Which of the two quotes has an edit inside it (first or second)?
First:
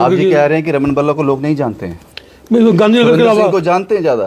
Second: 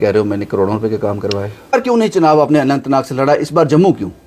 second